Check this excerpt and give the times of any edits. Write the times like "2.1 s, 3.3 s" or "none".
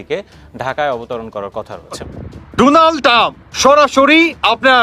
2.1 s